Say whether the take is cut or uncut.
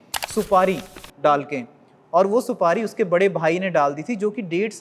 uncut